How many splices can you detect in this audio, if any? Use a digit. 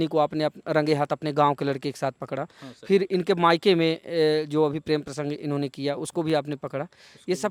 0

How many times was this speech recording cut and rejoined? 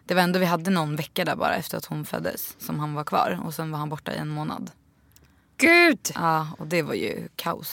0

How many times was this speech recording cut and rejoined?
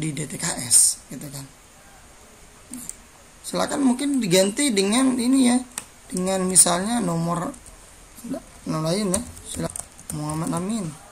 1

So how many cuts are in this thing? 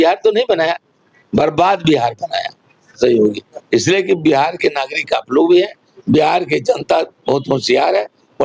1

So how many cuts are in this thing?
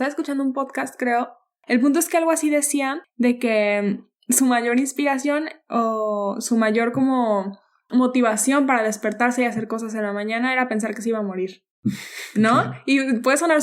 1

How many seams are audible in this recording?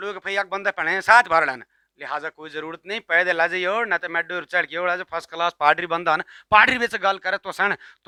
0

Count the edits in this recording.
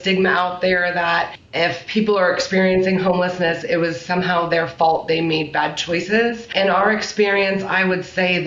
3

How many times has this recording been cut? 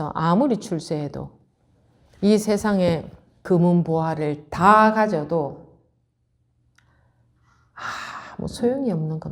1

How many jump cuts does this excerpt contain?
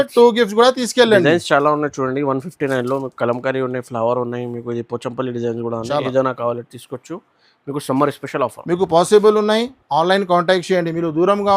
0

